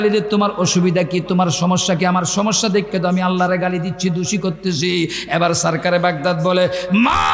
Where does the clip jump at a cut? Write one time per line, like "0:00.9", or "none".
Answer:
none